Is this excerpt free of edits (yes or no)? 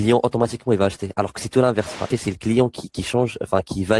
no